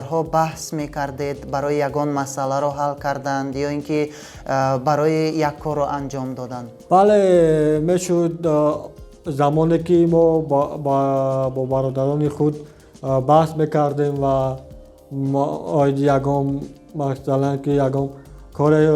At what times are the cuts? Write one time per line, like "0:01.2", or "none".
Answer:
0:06.7